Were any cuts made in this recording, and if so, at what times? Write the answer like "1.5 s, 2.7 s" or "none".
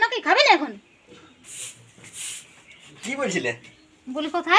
1.4 s